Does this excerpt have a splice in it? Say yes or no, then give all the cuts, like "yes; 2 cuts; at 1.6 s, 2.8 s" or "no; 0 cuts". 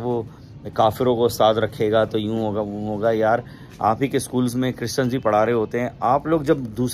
no; 0 cuts